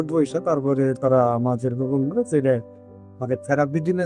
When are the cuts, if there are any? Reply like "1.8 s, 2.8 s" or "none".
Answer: none